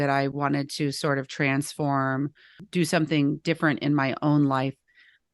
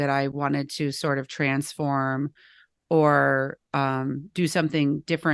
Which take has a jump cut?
first; 1 cut; at 2.6 s

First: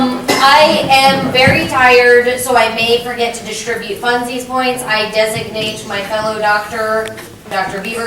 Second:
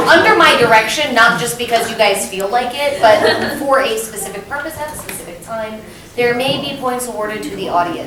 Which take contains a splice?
first; 1 cut; at 6.4 s

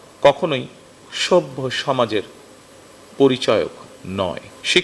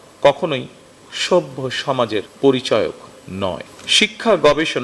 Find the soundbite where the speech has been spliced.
second; 2 cuts; at 2.3 s, 3.7 s

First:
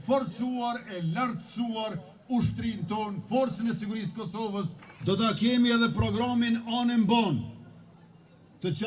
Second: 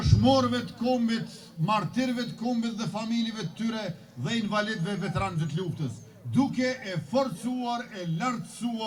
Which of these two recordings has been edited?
first; 1 cut; at 4.8 s

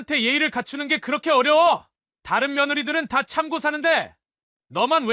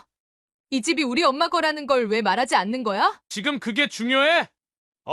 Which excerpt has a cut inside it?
second; 1 cut; at 3.2 s

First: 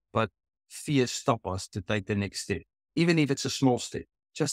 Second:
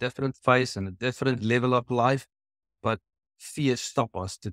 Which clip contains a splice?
first; 1 cut; at 2.8 s

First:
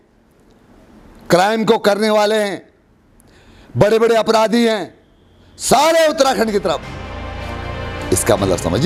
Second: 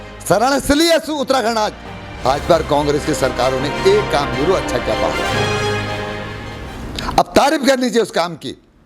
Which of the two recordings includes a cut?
second; 1 cut; at 2.3 s

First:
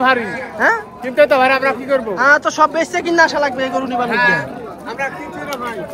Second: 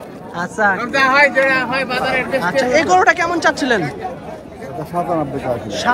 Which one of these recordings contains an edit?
second; 1 cut; at 2.7 s

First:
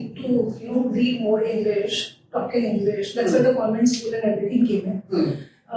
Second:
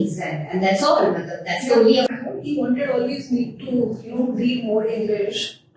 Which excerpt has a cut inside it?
second; 1 cut; at 2.1 s

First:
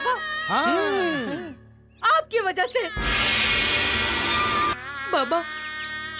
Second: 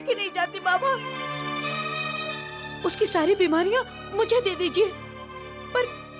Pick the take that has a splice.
first; 1 cut; at 4.7 s

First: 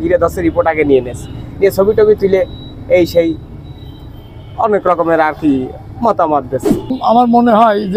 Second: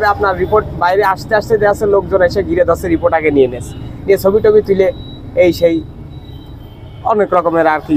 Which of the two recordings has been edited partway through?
first; 1 cut; at 7.0 s

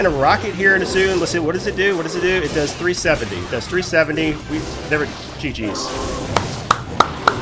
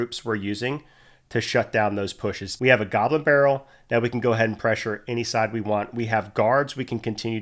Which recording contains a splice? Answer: second; 1 cut; at 2.5 s

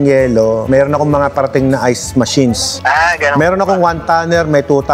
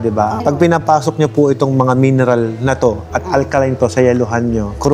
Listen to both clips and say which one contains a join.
first; 1 cut; at 2.7 s

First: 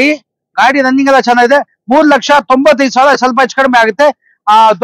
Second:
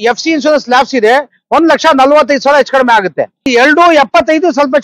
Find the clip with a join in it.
second; 1 cut; at 3.5 s

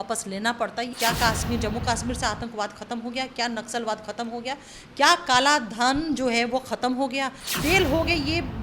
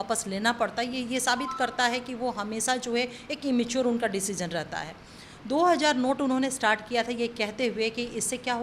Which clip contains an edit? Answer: first; 2 cuts; at 0.9 s, 7.4 s

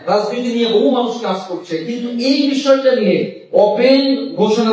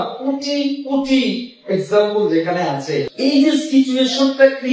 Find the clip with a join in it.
second; 1 cut; at 3.1 s

